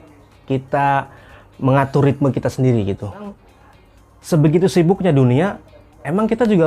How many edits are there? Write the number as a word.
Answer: one